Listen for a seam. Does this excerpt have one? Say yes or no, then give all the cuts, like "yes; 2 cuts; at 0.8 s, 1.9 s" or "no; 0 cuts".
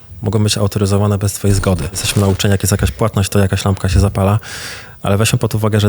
yes; 1 cut; at 2.1 s